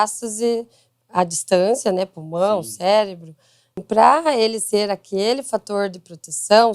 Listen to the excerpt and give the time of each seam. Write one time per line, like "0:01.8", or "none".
0:03.9

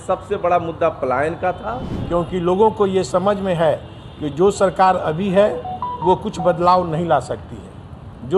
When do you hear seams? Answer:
0:02.0

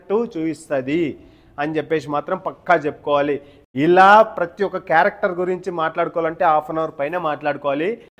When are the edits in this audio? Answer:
0:03.5

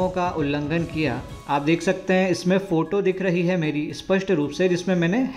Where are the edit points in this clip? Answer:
none

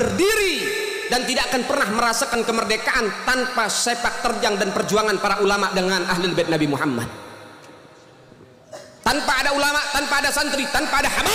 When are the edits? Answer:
none

